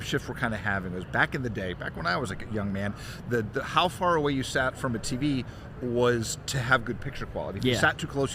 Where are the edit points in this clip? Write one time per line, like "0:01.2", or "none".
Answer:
none